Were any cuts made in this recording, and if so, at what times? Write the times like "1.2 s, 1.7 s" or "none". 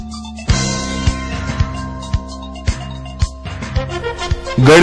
2.8 s